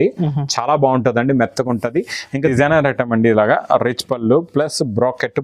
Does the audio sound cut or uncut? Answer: cut